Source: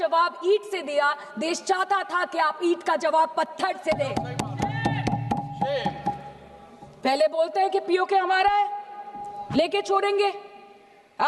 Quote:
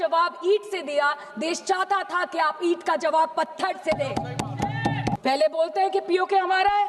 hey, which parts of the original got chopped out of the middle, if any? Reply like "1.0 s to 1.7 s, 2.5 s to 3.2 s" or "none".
5.2 s to 7.0 s